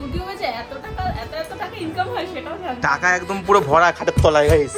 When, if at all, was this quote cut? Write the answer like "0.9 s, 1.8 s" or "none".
none